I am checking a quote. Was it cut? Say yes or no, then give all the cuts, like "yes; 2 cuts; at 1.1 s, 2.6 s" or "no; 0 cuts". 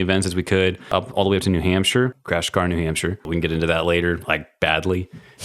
yes; 3 cuts; at 0.9 s, 2.2 s, 3.2 s